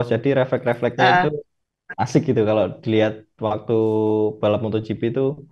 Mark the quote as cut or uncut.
uncut